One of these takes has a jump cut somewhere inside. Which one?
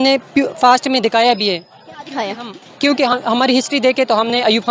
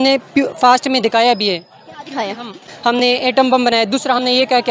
second; 1 cut; at 2.7 s

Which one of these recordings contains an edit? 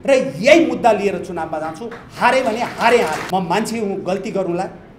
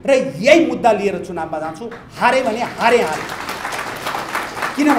first; 1 cut; at 3.2 s

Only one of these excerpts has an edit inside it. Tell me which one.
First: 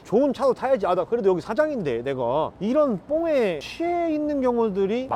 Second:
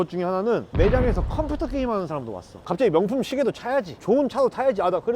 second; 1 cut; at 2.6 s

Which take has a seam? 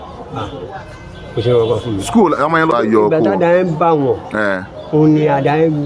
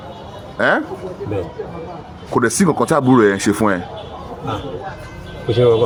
first; 1 cut; at 2.7 s

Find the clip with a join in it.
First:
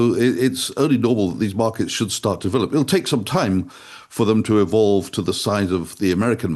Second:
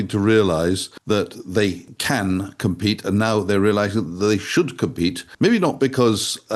second; 3 cuts; at 0.9 s, 1.9 s, 5.3 s

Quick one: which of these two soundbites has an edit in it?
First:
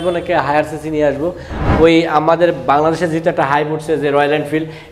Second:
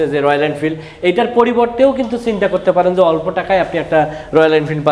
first; 1 cut; at 1.6 s

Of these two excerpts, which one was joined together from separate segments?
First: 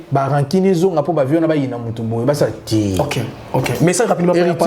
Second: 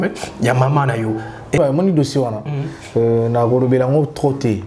second; 1 cut; at 1.6 s

